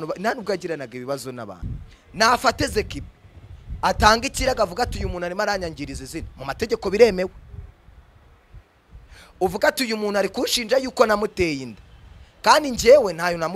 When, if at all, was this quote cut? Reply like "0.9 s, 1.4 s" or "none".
1.5 s